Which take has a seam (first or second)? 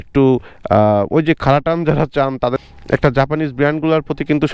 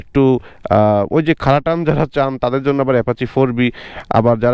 first